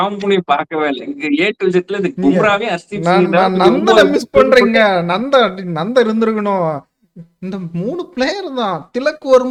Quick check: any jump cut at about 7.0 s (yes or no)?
no